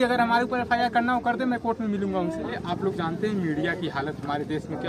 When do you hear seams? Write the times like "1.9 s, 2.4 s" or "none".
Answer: 2.6 s